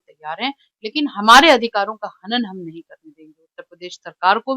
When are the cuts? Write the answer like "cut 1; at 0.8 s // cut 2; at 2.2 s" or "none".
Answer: none